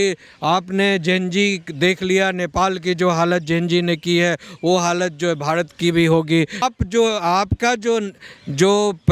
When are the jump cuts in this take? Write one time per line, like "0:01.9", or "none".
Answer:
none